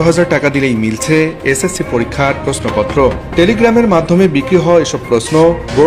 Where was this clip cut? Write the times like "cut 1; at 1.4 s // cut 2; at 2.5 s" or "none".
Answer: none